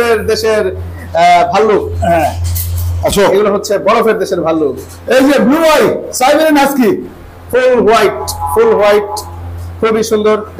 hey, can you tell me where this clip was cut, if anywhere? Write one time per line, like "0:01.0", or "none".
none